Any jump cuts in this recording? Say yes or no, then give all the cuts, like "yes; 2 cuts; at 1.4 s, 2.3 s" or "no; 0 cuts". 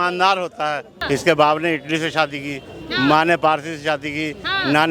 yes; 1 cut; at 0.9 s